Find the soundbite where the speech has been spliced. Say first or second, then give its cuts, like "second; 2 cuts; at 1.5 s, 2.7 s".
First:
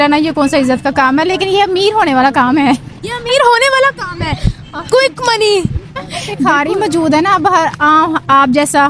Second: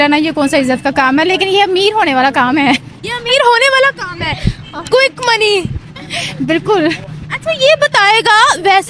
first; 1 cut; at 6.5 s